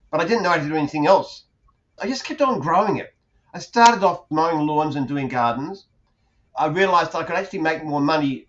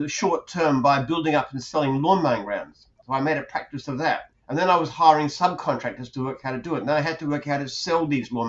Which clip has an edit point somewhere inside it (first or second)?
second